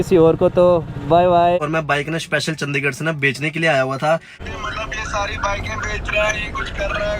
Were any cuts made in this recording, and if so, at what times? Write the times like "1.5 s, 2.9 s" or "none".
1.6 s, 4.4 s